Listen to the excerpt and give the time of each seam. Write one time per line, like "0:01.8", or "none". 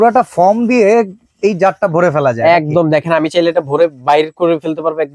none